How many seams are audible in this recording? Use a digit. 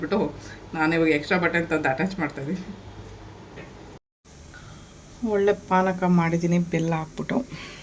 1